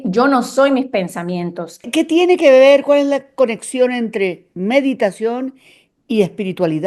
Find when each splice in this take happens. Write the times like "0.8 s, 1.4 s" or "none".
1.9 s